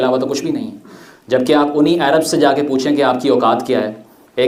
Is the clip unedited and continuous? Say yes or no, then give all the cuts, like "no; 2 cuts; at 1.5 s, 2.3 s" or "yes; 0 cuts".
yes; 0 cuts